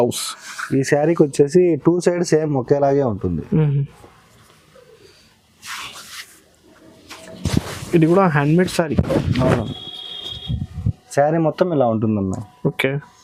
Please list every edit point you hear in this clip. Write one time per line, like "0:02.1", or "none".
none